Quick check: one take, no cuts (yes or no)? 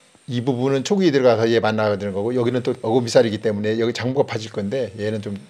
no